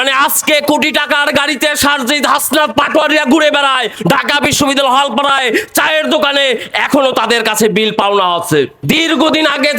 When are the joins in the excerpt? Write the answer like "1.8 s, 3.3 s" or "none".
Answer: 3.9 s, 8.8 s

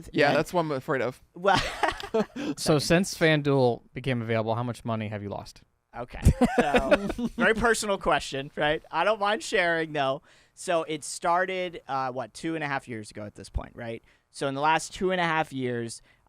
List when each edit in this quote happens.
2.6 s

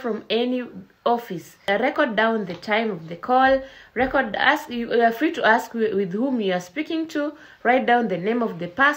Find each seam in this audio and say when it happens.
1.7 s

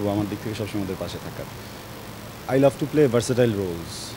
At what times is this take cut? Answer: none

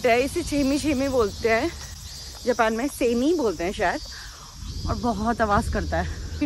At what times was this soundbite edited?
none

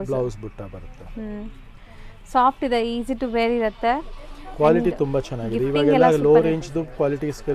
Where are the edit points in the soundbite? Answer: none

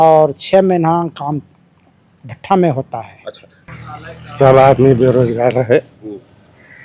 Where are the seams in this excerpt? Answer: 3.5 s

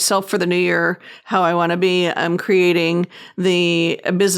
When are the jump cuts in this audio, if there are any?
none

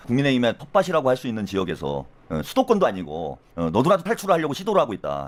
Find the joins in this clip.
none

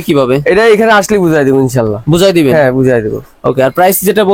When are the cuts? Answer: none

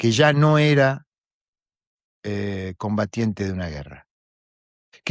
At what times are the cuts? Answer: none

